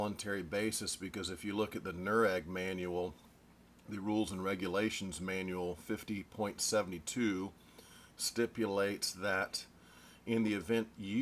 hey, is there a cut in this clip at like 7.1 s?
yes; 1 cut; at 7.1 s

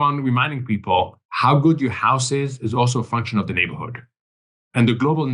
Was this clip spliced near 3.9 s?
no; 1 cut; at 1.2 s

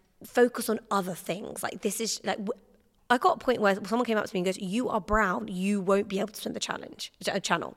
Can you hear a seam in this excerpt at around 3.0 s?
no; 0 cuts

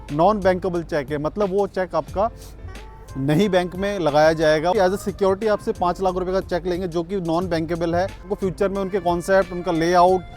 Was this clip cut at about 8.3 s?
yes; 2 cuts; at 4.7 s, 8.3 s

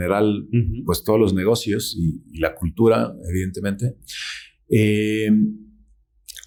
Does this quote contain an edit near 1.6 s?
no; 0 cuts

